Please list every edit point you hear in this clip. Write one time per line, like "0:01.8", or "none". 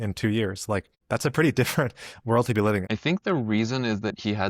0:00.9
0:02.8